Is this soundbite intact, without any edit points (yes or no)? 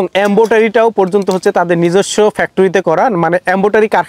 yes